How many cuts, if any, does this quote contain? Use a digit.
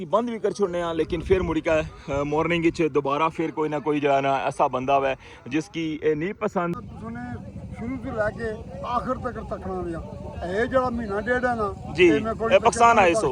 1